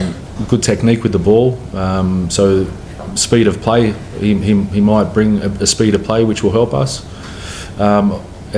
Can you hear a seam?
no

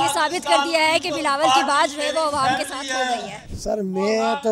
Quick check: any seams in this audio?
yes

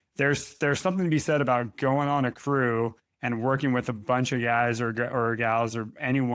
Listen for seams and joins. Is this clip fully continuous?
yes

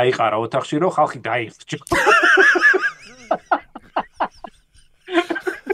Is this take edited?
no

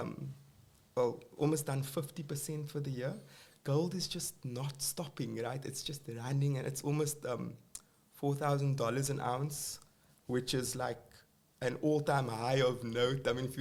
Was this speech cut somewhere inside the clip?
no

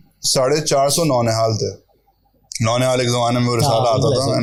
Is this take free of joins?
yes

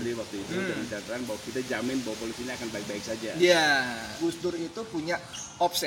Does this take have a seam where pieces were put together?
yes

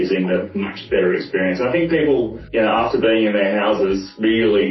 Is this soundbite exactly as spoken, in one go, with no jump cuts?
no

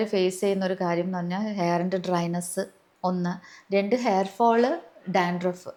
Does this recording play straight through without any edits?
yes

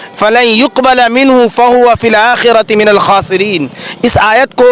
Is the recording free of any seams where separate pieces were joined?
yes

